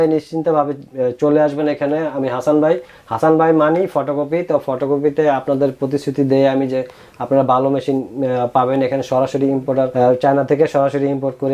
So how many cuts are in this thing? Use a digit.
0